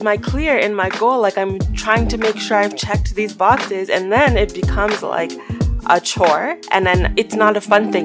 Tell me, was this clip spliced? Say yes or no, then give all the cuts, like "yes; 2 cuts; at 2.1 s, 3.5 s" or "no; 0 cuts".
yes; 1 cut; at 7.1 s